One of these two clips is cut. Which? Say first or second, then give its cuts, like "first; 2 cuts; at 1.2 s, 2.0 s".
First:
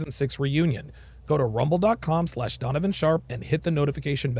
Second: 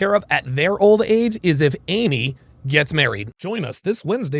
second; 1 cut; at 3.3 s